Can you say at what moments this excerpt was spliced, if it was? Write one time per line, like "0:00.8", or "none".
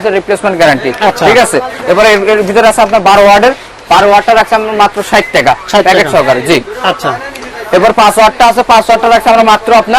none

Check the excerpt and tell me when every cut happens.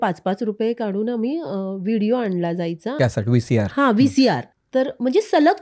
0:03.0
0:04.5

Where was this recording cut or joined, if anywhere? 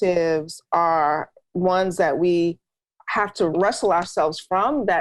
0:03.5

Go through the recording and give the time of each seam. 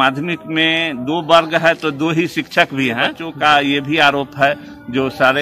0:03.2

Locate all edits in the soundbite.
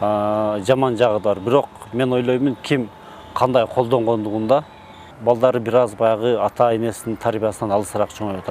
0:05.1

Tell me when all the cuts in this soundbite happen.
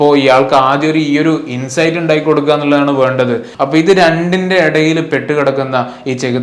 0:03.5

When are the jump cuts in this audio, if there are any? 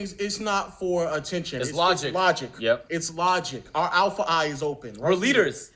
0:03.5

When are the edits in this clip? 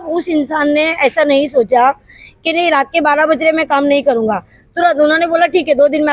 none

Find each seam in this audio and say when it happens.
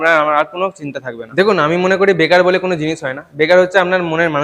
0:01.3

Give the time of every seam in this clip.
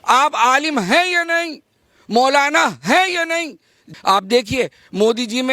0:03.8

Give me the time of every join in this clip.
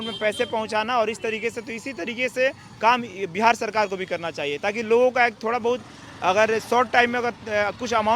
none

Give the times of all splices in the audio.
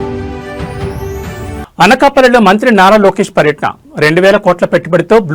0:01.5

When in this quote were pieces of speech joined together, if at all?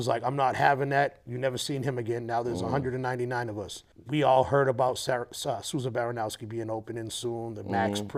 none

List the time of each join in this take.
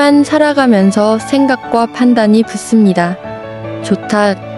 none

